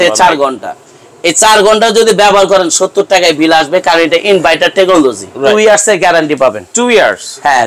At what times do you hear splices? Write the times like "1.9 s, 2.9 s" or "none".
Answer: 5.4 s